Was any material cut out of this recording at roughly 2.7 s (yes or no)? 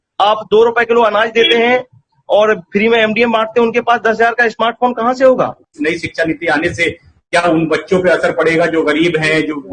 no